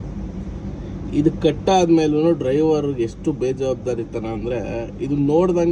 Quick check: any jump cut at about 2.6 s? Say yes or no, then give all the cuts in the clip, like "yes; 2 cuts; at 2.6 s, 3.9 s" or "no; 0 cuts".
no; 0 cuts